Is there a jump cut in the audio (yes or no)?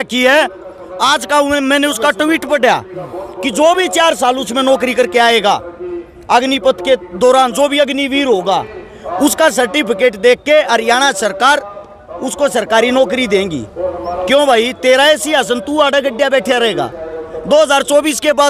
no